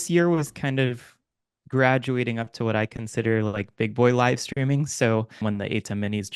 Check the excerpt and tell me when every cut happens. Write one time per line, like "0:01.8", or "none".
0:05.4

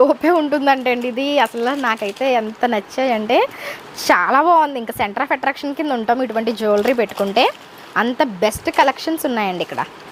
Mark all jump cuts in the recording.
none

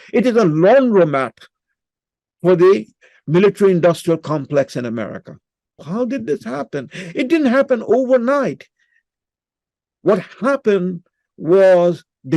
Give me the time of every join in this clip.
0:05.8

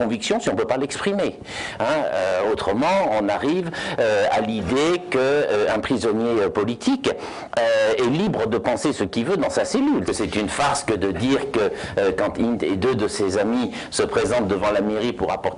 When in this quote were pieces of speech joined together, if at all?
0:10.1

